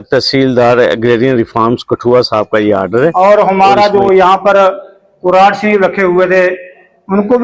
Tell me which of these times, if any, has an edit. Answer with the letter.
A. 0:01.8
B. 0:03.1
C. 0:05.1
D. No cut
B